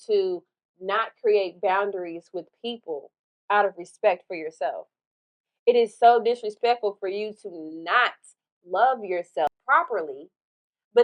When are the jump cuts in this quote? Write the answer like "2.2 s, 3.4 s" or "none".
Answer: 9.5 s